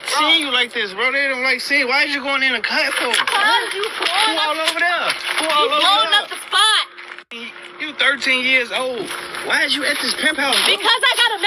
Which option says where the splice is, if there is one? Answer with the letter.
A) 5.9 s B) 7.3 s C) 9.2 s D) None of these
B